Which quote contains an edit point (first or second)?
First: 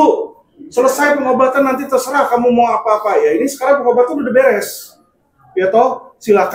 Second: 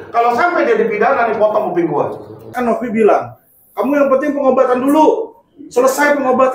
second